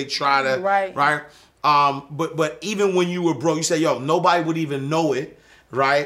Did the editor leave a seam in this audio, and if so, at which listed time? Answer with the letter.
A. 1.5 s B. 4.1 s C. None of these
C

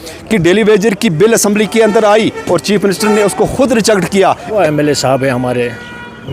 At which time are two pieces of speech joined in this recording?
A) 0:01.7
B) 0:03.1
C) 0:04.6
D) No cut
C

